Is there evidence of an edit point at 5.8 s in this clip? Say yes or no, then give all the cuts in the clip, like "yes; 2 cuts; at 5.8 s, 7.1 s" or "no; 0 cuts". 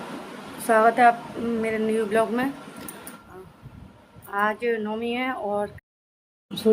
yes; 1 cut; at 5.8 s